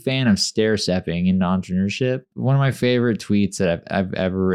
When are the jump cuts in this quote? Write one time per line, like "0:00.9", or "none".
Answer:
0:02.3